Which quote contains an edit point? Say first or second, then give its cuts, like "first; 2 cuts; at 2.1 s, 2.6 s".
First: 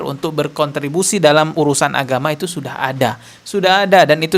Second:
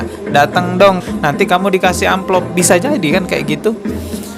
second; 1 cut; at 1.0 s